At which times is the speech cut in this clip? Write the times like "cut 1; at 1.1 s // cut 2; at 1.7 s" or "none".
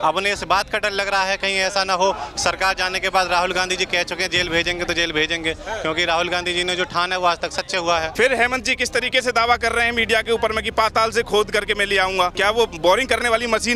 cut 1; at 8.1 s // cut 2; at 12.3 s